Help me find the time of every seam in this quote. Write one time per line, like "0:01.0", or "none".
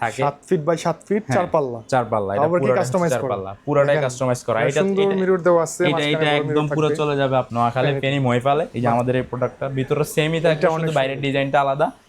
0:07.5
0:08.7